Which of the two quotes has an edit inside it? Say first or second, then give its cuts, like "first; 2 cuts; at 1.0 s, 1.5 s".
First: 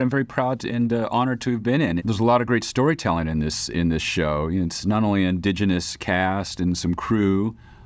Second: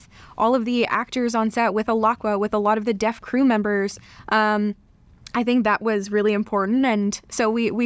first; 1 cut; at 2.0 s